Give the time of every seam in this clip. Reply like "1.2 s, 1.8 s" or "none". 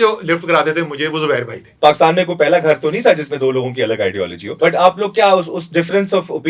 1.6 s, 4.4 s